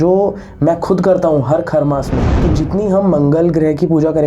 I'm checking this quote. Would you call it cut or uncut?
cut